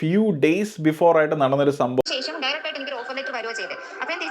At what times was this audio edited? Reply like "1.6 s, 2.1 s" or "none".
2.1 s